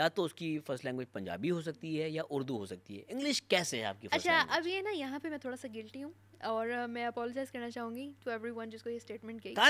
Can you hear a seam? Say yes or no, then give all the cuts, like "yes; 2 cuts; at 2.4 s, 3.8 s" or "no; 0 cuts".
no; 0 cuts